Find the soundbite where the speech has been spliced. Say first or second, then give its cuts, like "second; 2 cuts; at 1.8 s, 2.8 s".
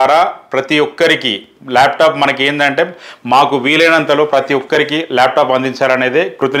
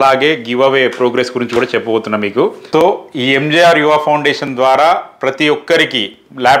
second; 1 cut; at 2.6 s